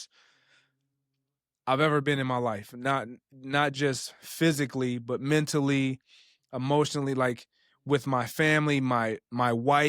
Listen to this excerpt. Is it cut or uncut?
uncut